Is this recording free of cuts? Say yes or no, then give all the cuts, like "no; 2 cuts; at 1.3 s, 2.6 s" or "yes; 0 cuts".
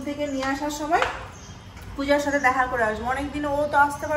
yes; 0 cuts